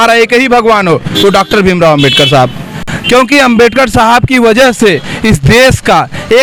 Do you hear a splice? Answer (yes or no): no